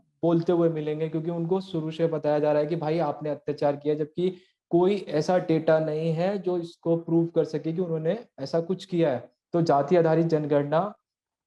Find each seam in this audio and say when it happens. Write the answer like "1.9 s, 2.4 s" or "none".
9.3 s